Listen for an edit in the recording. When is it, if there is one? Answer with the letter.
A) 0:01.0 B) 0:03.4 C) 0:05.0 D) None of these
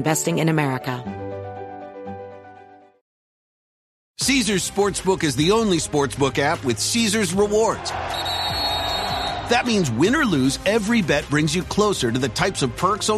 A